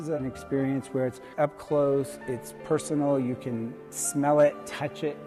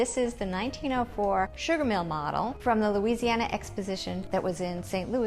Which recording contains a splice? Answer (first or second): second